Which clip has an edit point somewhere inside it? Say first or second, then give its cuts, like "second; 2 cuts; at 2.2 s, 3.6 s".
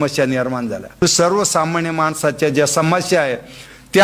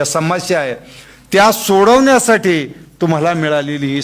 first; 1 cut; at 1.0 s